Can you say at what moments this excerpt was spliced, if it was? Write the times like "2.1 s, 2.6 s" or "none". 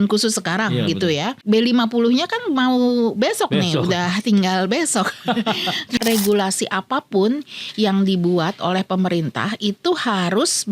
1.3 s, 6.0 s